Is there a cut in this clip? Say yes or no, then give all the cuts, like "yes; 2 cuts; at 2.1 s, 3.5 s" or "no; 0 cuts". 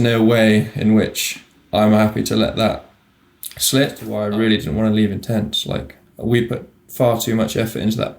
yes; 1 cut; at 4.1 s